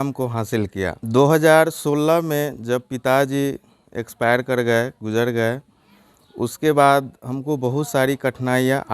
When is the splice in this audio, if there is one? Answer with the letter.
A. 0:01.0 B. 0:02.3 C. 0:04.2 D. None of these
A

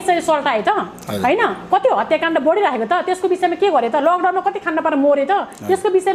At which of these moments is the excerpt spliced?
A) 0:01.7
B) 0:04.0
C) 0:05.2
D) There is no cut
D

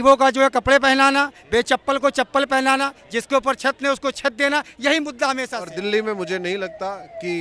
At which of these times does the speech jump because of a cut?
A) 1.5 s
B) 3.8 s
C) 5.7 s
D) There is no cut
C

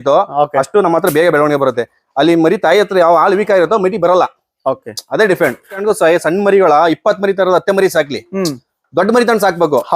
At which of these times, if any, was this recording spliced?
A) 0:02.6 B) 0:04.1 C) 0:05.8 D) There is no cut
C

